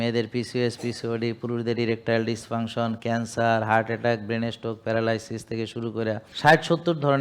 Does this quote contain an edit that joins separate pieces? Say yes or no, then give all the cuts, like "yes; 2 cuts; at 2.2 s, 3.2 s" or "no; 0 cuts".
yes; 1 cut; at 6.3 s